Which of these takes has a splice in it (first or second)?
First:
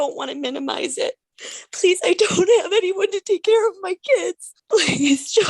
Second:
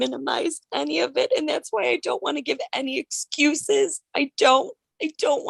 first